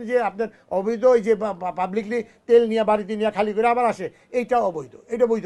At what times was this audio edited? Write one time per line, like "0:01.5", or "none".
none